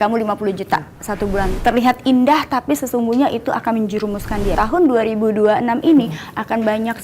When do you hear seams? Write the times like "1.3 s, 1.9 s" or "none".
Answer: 1.5 s, 4.5 s